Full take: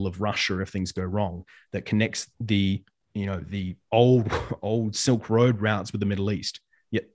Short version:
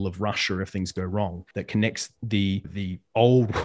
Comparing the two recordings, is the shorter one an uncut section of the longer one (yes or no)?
no